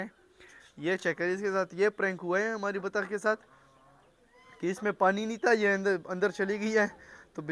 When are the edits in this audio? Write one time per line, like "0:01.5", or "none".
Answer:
none